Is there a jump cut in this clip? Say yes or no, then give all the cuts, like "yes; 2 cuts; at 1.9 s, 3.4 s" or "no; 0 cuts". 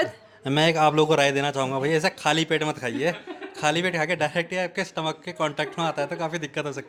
no; 0 cuts